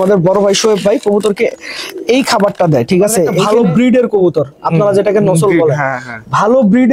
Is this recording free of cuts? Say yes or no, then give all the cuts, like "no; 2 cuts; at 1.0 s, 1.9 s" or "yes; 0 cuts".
no; 1 cut; at 3.4 s